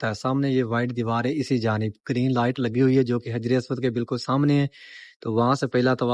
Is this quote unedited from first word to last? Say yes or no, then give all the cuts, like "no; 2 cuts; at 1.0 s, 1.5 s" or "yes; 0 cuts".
yes; 0 cuts